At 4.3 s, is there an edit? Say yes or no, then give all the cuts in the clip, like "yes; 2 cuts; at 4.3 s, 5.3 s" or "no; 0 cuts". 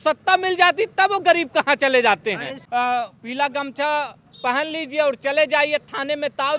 no; 1 cut; at 2.5 s